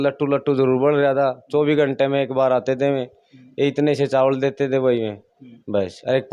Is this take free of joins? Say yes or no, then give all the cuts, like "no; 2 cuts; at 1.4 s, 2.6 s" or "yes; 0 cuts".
yes; 0 cuts